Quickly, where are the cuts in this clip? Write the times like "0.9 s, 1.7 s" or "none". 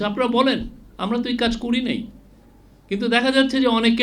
none